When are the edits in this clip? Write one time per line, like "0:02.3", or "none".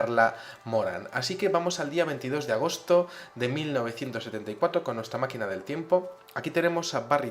0:03.9